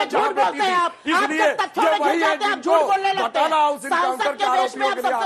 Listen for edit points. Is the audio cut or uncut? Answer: uncut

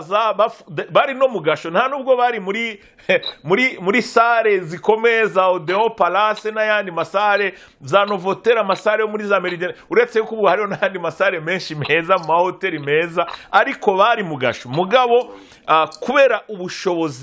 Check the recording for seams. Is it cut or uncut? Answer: uncut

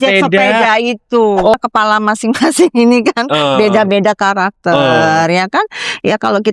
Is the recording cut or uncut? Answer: cut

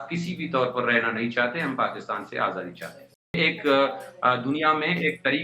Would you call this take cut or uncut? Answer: cut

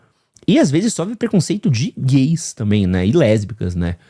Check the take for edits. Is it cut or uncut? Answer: uncut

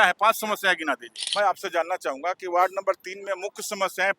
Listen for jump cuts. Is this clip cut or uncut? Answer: cut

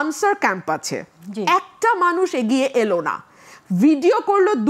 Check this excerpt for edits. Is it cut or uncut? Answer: uncut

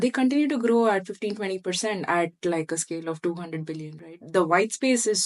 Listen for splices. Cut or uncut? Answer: uncut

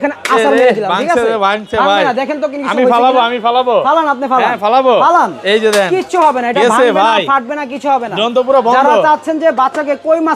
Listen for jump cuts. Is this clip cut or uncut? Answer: uncut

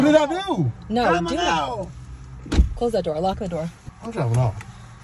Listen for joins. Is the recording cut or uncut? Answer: cut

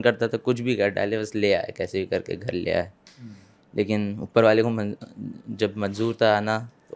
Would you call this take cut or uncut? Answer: uncut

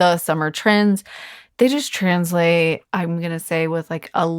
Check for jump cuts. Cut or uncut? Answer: cut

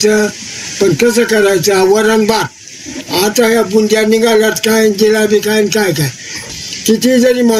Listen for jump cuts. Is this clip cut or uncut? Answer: cut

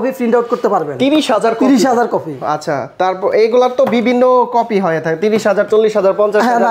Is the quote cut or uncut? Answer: uncut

